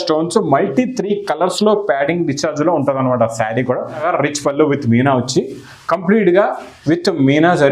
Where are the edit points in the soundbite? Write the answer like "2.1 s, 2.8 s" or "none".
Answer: 4.0 s